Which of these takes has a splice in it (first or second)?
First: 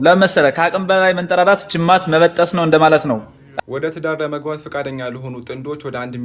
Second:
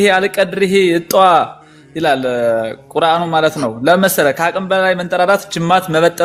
first